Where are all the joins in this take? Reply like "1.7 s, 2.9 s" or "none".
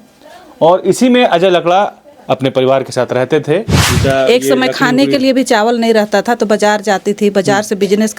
3.8 s